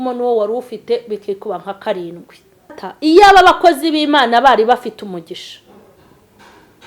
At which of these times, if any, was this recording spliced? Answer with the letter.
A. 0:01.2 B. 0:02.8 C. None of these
B